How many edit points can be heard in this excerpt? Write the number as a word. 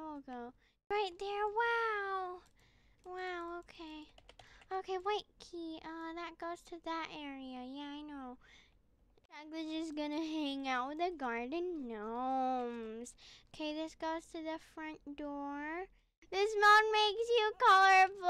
three